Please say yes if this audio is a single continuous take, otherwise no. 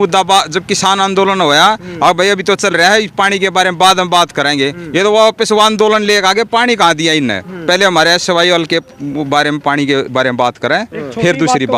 yes